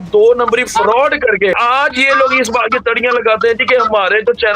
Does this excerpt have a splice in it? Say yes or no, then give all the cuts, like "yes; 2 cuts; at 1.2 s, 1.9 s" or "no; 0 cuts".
yes; 1 cut; at 1.5 s